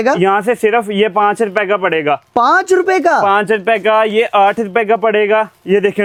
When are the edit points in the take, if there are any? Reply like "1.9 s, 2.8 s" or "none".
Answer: none